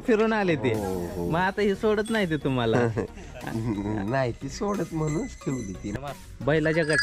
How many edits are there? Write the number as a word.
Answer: one